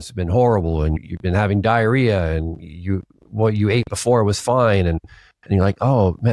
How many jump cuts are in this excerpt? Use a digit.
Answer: 0